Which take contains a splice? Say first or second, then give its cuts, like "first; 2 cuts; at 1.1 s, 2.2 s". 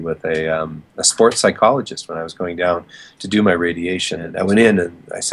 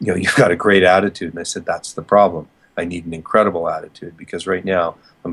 first; 1 cut; at 4.3 s